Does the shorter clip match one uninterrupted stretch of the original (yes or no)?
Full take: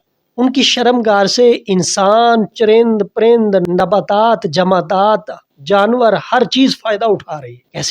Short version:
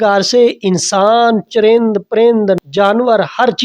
no